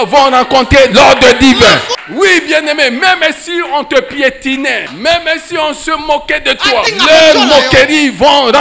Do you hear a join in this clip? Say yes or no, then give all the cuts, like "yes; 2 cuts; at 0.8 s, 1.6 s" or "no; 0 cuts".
yes; 3 cuts; at 2.0 s, 4.9 s, 6.9 s